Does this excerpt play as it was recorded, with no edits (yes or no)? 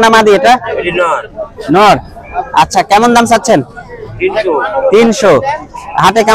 yes